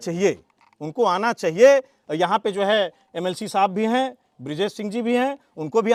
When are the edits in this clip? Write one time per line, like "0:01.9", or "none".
none